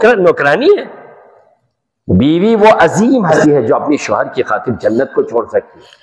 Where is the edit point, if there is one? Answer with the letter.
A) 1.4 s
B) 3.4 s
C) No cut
B